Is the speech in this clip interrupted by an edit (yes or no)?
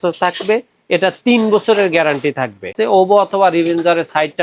yes